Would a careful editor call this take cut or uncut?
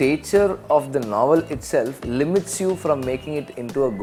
uncut